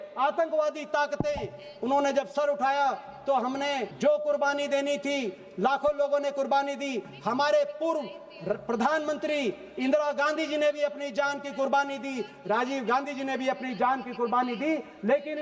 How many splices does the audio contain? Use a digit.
0